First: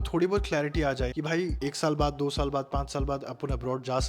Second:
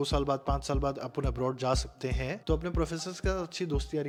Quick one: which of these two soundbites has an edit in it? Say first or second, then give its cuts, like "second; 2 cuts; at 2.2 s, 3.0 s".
first; 1 cut; at 1.1 s